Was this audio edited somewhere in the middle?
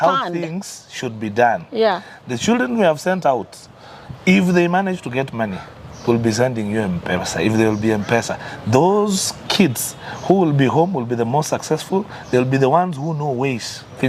no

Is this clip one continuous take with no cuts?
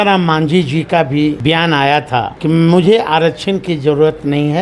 no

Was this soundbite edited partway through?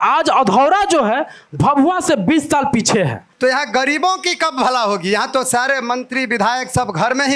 yes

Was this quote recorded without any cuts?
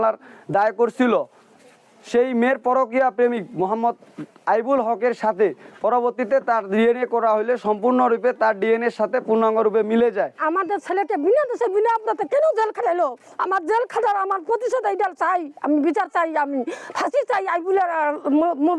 yes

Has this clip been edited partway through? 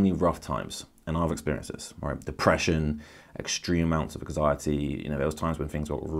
no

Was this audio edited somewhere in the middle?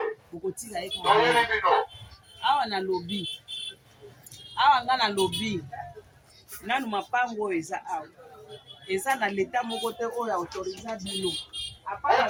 no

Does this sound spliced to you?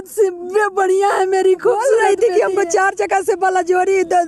yes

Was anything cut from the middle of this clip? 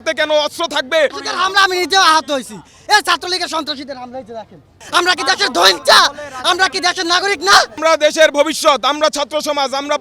yes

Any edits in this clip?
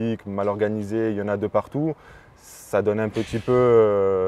no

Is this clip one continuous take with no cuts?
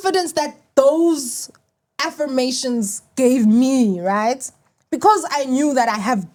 yes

